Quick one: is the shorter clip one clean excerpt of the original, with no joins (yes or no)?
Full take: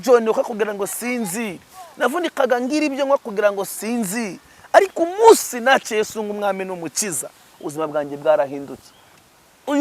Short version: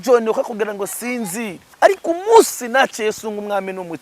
no